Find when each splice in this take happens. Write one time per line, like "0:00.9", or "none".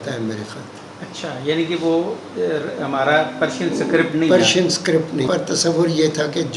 0:05.3